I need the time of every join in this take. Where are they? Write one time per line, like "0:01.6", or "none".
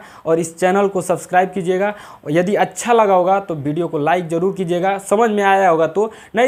none